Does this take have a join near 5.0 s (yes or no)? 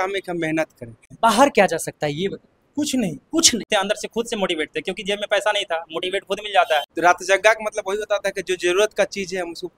no